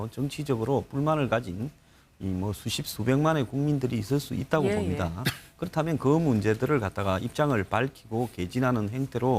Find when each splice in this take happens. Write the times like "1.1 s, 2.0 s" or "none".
8.5 s